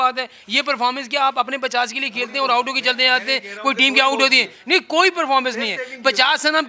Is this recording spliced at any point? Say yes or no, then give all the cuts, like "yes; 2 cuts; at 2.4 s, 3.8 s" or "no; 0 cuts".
no; 0 cuts